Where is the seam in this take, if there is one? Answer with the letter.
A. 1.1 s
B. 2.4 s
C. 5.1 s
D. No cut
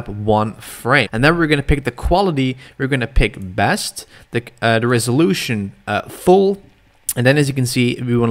A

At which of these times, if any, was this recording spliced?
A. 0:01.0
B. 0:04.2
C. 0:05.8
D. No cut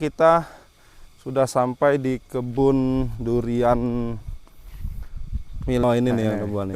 C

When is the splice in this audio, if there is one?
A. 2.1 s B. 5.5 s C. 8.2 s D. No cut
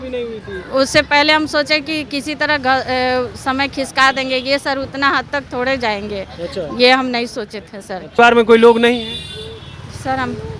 C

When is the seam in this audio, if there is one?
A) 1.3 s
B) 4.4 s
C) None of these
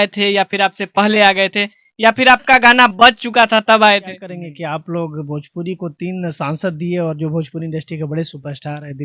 B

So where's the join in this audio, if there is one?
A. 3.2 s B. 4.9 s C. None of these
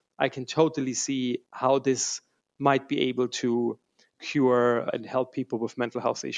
B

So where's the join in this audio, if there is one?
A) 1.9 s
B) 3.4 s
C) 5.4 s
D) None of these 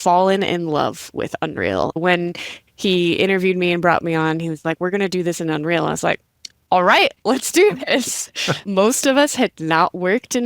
A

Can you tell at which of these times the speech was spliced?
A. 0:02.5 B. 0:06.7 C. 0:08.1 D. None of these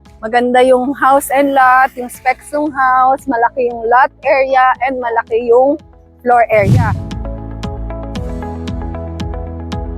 B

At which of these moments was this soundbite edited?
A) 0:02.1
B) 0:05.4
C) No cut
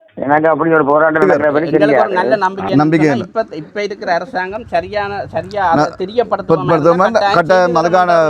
A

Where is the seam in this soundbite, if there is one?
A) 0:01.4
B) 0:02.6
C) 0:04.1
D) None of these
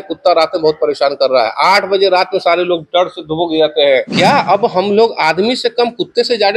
C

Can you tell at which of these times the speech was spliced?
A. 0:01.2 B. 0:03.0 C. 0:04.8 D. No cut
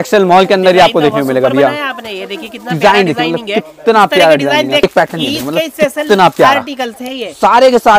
C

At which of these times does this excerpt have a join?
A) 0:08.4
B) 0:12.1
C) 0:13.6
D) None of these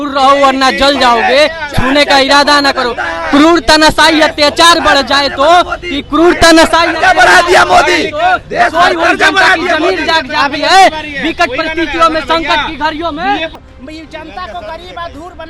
C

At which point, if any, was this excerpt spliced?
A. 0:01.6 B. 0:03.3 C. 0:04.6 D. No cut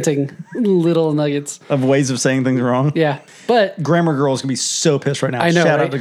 B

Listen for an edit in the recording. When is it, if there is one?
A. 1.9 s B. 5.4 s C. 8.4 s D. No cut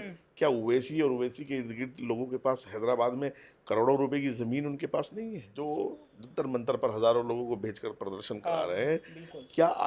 B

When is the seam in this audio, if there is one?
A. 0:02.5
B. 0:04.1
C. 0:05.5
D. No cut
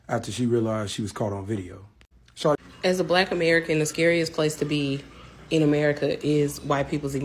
A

